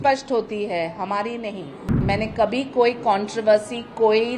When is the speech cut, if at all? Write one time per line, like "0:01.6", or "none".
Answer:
0:02.0